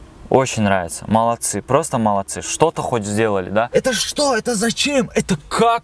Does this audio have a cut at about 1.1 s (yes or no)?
no